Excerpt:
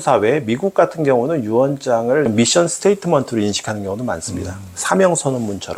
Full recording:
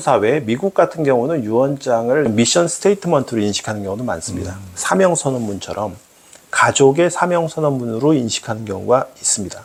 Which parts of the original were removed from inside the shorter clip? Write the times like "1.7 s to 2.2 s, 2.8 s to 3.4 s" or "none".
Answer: none